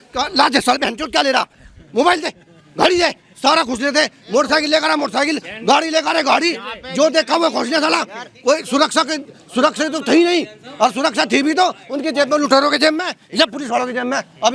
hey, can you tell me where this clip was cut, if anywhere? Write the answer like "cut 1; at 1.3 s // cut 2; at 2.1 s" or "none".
none